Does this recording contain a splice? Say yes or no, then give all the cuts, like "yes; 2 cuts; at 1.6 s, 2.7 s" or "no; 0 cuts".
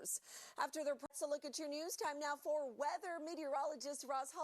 yes; 1 cut; at 1.1 s